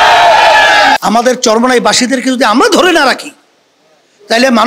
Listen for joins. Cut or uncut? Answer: cut